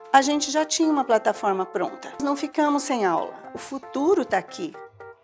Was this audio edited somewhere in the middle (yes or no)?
yes